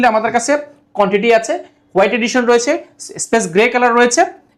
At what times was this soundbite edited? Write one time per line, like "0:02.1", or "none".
none